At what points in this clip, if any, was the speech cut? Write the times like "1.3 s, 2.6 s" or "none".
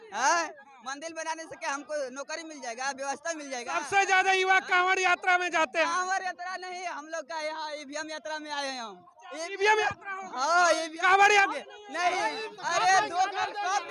12.5 s